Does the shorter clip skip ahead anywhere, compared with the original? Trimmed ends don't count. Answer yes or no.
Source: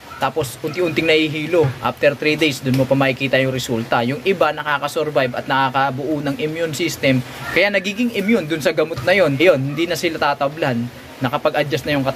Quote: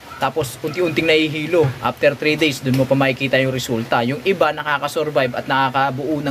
no